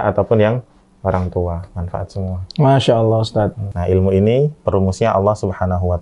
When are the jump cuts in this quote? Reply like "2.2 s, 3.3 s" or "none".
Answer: 3.7 s